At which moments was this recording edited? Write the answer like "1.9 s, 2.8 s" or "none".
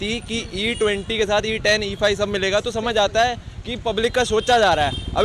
none